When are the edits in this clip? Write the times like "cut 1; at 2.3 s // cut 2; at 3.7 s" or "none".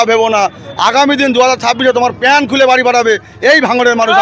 none